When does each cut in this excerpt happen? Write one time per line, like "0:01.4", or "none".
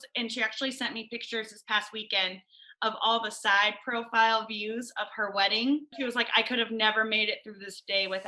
0:06.0